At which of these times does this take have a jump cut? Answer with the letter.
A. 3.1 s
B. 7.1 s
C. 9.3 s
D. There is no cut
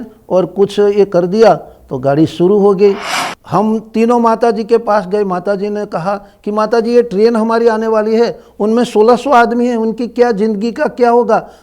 A